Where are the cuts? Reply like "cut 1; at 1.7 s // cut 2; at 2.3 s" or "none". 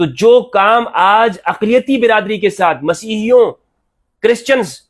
none